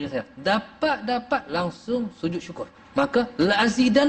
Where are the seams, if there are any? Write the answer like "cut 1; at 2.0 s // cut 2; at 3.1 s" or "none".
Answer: cut 1; at 2.7 s